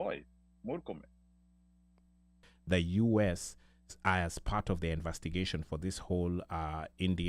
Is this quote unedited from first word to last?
no; 1 cut; at 2.5 s

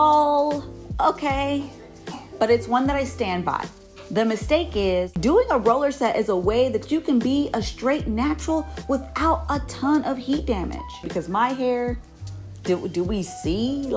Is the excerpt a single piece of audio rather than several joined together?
no; 2 cuts; at 5.1 s, 11.0 s

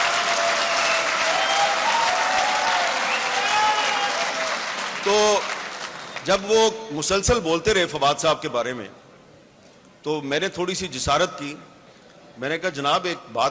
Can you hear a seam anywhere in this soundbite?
no; 0 cuts

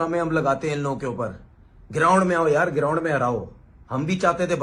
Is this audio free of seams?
yes; 0 cuts

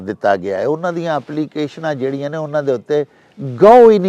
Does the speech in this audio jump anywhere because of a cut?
no; 0 cuts

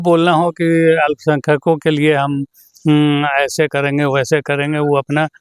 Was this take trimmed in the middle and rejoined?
no; 0 cuts

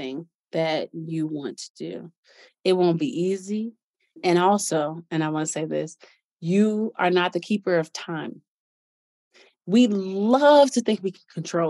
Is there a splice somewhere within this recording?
yes; 1 cut; at 4.2 s

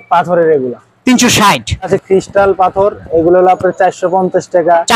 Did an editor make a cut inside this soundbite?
yes; 1 cut; at 1.9 s

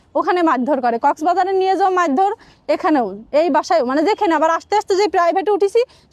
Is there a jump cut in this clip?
no; 0 cuts

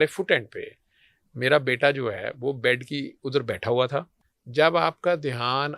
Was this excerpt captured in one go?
no; 1 cut; at 4.2 s

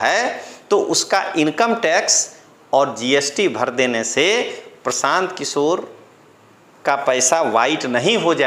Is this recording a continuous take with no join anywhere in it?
yes; 0 cuts

